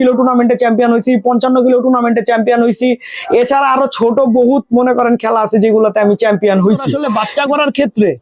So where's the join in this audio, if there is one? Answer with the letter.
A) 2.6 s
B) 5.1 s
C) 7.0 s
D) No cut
C